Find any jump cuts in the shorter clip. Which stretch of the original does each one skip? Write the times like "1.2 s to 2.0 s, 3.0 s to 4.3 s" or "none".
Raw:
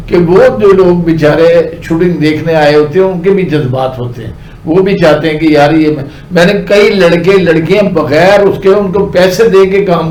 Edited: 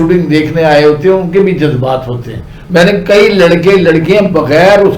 4.4 s to 6.1 s